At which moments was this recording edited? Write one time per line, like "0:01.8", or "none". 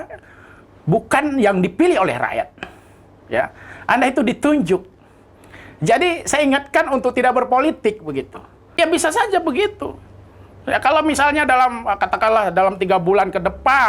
0:08.8